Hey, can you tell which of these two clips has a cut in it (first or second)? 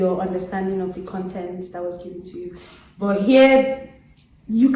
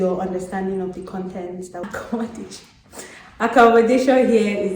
second